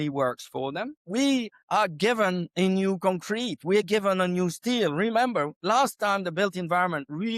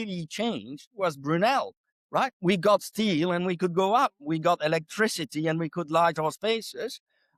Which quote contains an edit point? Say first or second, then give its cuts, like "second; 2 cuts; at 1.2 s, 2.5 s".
first; 2 cuts; at 1.0 s, 1.6 s